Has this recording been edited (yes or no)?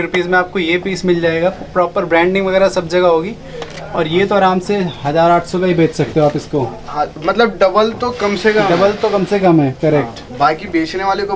no